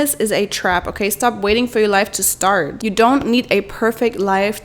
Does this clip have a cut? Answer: no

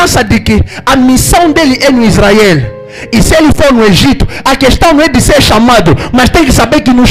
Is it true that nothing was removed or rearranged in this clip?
yes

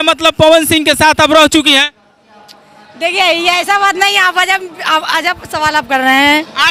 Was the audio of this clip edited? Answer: no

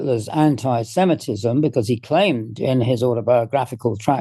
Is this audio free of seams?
yes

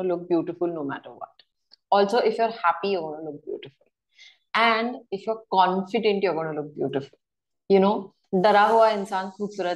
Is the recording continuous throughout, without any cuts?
yes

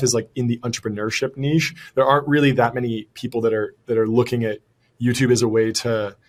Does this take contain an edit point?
no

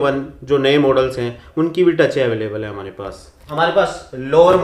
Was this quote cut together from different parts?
yes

